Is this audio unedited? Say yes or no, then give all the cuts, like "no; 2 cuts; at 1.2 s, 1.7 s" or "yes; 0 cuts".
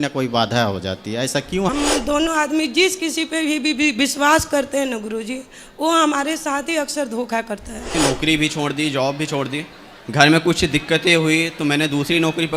no; 2 cuts; at 1.7 s, 7.9 s